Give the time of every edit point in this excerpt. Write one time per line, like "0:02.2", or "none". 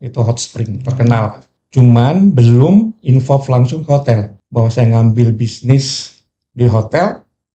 0:01.5
0:04.4